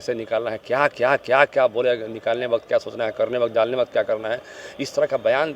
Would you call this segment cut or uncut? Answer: uncut